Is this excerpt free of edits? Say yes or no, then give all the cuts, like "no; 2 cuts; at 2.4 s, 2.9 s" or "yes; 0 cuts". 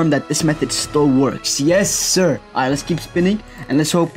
yes; 0 cuts